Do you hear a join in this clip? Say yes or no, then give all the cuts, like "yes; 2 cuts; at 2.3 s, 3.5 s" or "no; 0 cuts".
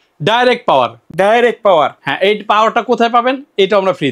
no; 0 cuts